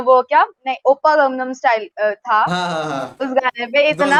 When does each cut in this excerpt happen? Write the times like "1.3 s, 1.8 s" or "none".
none